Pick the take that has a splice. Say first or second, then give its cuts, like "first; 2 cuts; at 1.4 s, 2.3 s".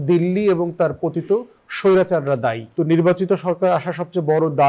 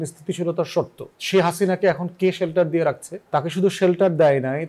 first; 1 cut; at 2.6 s